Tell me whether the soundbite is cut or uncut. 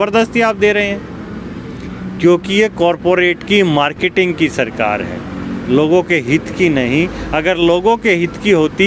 uncut